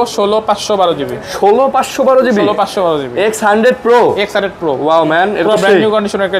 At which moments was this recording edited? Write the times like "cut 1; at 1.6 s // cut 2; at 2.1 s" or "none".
none